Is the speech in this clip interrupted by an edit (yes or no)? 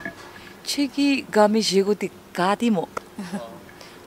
no